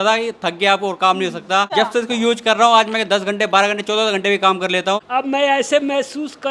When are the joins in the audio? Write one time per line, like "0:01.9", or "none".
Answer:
0:01.7
0:05.0